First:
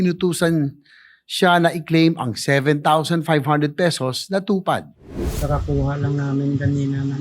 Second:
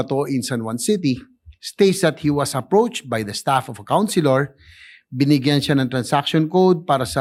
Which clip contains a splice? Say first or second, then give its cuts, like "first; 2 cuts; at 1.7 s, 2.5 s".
first; 1 cut; at 5.3 s